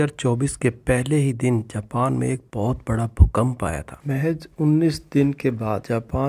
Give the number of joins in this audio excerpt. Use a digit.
1